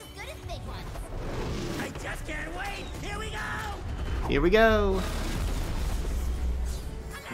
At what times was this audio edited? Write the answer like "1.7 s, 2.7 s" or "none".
none